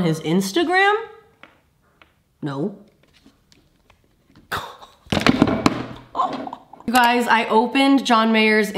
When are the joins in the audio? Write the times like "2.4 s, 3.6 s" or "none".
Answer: none